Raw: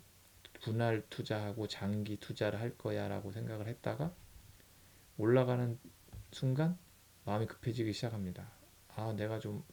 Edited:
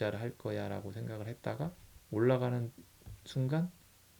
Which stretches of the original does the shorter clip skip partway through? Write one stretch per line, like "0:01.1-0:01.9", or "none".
0:04.3-0:05.0

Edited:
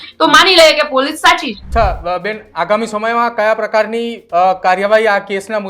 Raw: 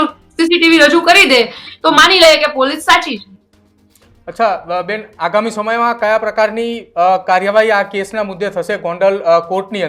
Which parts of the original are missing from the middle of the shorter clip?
0:03.2-0:04.2

